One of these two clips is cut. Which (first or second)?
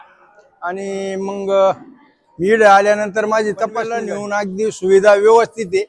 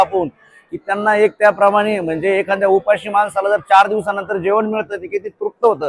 first